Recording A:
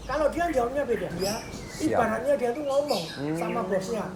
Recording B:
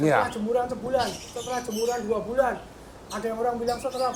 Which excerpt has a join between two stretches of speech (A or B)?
A